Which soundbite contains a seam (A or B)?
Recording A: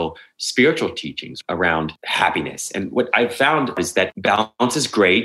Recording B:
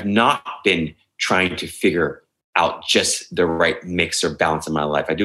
A